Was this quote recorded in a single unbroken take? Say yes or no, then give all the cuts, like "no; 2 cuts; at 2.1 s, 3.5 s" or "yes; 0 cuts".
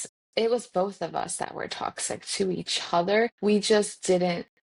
no; 1 cut; at 3.4 s